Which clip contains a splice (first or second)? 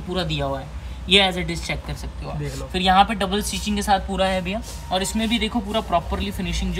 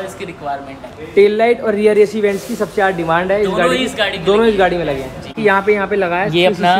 second